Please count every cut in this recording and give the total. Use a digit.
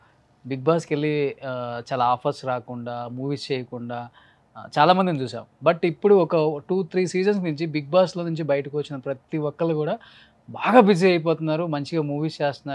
0